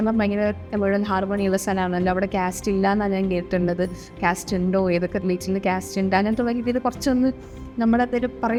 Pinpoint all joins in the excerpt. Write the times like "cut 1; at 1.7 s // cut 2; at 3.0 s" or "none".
none